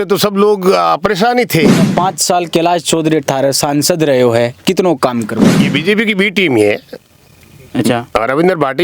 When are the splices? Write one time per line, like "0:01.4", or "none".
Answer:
0:01.9
0:05.6